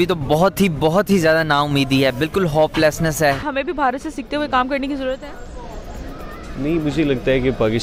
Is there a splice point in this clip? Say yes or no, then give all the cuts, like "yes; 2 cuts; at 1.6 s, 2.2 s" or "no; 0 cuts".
no; 0 cuts